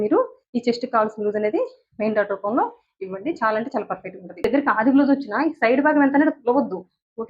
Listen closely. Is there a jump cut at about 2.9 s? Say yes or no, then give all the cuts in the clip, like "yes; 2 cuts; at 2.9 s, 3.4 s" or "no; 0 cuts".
no; 1 cut; at 4.4 s